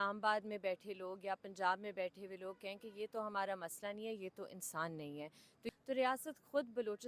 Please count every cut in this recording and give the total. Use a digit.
1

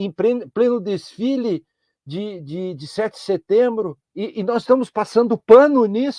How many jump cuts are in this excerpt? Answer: 1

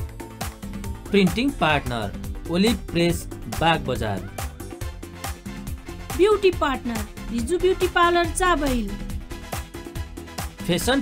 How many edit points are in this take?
0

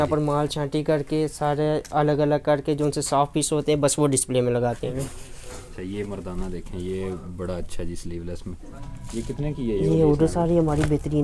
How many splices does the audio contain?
2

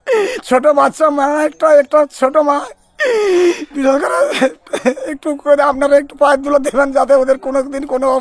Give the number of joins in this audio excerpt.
0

